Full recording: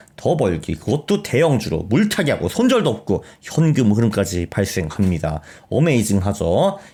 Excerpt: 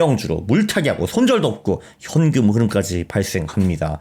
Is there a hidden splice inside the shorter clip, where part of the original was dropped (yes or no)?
no